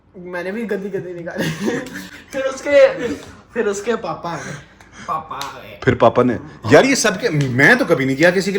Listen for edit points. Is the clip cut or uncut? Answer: uncut